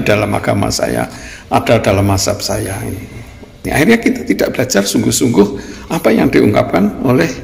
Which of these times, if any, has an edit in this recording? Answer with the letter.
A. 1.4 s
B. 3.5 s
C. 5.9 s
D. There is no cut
B